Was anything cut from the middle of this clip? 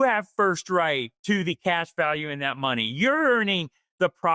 yes; 1 cut; at 1.1 s

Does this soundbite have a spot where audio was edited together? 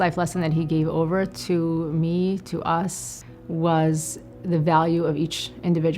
no; 0 cuts

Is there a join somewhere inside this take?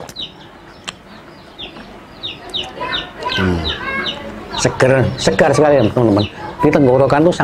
no; 0 cuts

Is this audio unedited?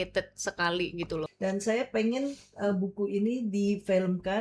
no; 1 cut; at 1.2 s

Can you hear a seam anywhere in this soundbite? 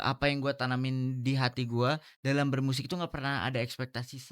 no; 0 cuts

